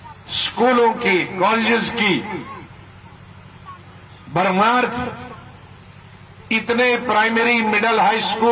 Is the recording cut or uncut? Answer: uncut